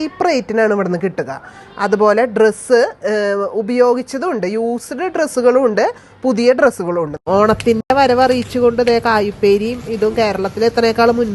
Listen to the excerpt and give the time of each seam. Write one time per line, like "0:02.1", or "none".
0:07.2